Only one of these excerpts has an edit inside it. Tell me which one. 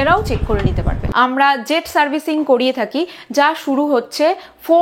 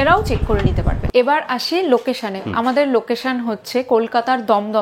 first; 1 cut; at 1.0 s

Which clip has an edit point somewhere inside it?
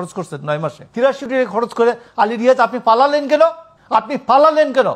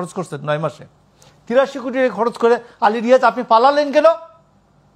first; 2 cuts; at 1.2 s, 3.7 s

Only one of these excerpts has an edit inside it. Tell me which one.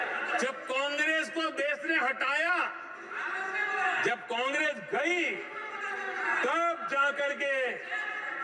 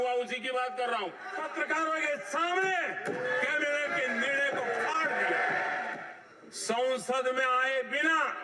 second; 2 cuts; at 1.3 s, 6.0 s

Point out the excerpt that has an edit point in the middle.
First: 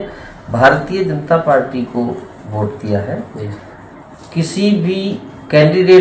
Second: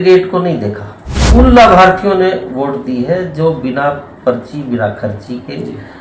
second; 1 cut; at 1.2 s

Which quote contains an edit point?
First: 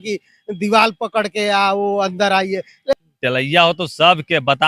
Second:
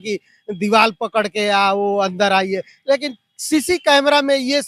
first; 1 cut; at 2.9 s

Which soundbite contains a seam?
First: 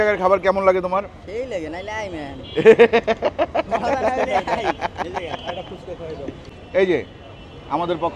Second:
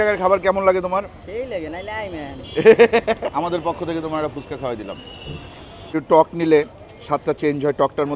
second; 2 cuts; at 3.3 s, 5.9 s

